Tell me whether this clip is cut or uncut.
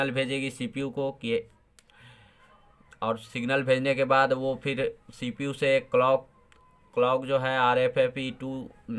uncut